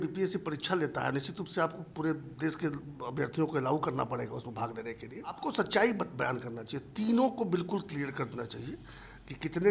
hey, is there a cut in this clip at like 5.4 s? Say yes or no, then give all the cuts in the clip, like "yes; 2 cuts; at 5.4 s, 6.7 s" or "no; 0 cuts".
yes; 1 cut; at 5.4 s